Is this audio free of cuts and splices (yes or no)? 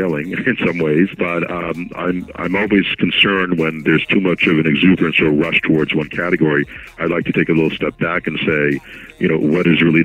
no